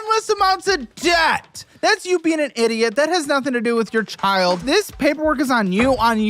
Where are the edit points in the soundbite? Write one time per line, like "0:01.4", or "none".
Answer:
0:01.7
0:04.6